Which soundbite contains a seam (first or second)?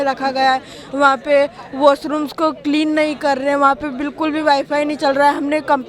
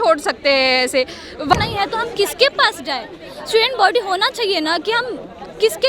second